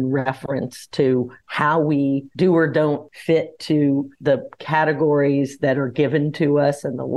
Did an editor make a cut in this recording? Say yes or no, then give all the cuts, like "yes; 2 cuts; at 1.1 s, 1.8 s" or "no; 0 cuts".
yes; 4 cuts; at 1.4 s, 2.3 s, 3.1 s, 4.1 s